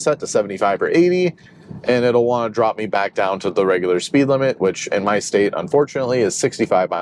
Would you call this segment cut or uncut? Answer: uncut